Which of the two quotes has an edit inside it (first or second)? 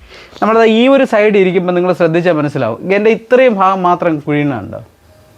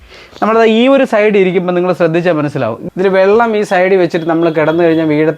second